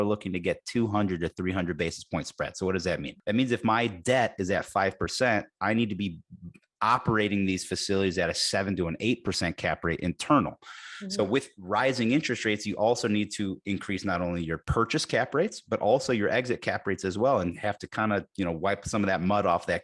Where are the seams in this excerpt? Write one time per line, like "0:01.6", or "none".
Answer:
0:03.1
0:14.6